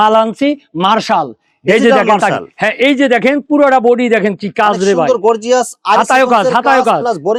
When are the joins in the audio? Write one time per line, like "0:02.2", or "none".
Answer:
none